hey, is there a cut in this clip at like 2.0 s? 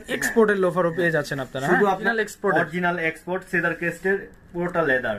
yes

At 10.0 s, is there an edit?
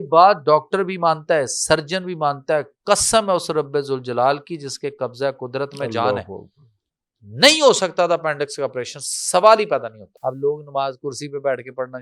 yes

